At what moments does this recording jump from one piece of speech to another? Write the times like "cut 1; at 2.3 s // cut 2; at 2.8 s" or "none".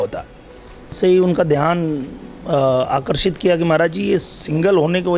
cut 1; at 1.0 s